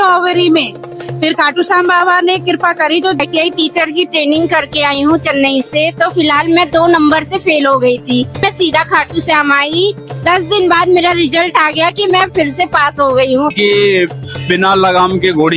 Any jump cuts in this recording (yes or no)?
yes